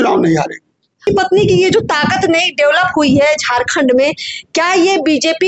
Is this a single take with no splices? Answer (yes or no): no